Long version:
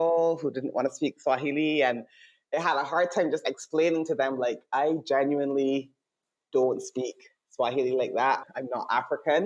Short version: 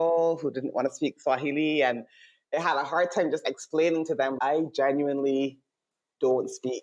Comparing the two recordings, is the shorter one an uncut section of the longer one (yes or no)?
no